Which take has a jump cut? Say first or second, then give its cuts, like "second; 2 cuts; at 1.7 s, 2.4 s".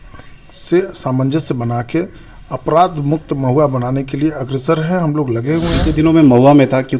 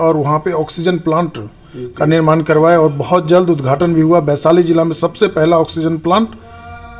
first; 1 cut; at 5.8 s